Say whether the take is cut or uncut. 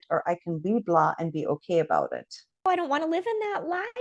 cut